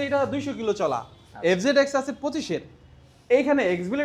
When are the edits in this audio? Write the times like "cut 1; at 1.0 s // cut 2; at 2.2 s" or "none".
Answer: none